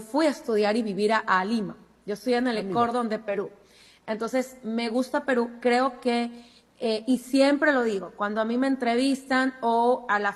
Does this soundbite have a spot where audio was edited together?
no; 0 cuts

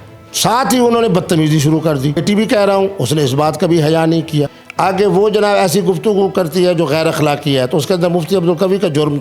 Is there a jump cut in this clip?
yes; 2 cuts; at 2.2 s, 4.6 s

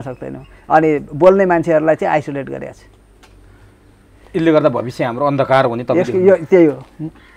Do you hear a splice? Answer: no; 0 cuts

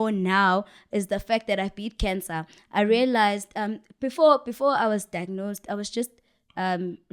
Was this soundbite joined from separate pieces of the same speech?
no; 0 cuts

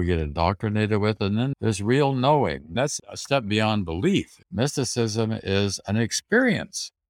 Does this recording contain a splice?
yes; 3 cuts; at 1.5 s, 2.8 s, 4.4 s

